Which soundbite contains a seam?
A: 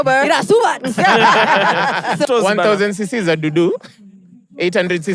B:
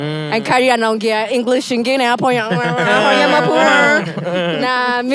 A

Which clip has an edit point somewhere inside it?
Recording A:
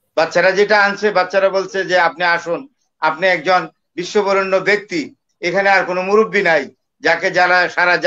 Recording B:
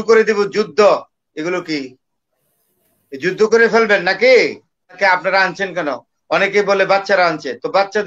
B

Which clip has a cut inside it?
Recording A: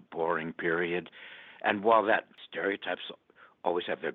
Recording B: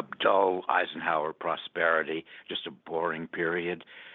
A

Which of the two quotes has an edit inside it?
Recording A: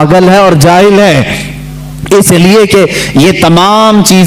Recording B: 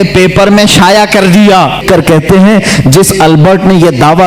B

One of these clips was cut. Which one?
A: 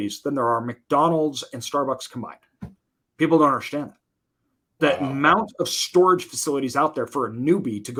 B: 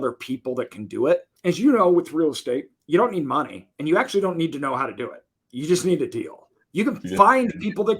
B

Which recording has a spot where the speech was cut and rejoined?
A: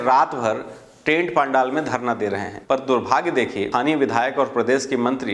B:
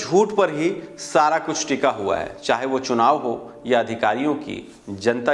A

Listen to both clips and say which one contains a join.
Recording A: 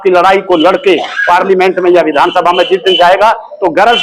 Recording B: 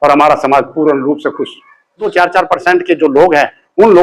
B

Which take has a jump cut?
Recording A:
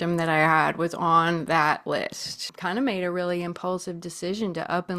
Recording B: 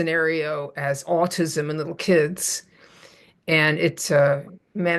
A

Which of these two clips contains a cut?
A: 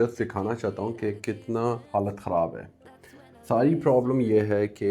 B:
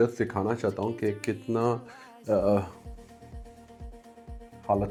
A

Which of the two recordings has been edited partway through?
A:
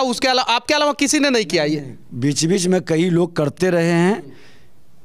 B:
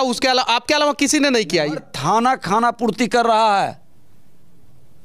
B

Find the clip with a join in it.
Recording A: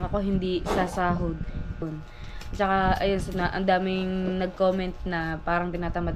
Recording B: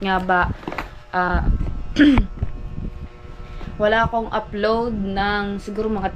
A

